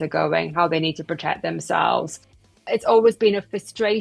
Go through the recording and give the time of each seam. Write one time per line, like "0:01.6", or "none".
0:02.5